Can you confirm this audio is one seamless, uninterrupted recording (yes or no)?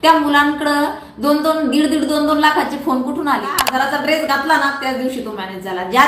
no